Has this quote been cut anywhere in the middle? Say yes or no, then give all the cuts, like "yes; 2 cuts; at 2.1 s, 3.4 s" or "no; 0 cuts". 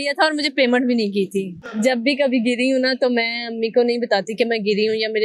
yes; 1 cut; at 1.5 s